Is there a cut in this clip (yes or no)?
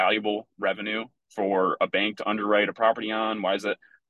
no